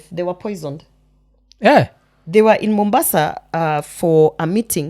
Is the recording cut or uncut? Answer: uncut